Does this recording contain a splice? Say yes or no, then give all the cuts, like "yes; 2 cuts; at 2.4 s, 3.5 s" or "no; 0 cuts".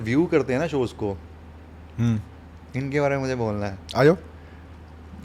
no; 0 cuts